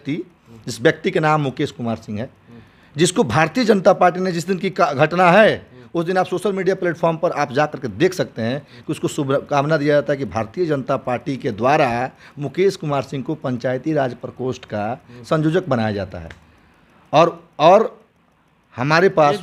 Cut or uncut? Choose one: uncut